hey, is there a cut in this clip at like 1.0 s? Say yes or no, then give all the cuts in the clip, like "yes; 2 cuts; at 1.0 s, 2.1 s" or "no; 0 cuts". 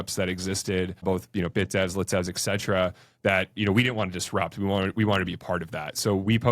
yes; 1 cut; at 1.0 s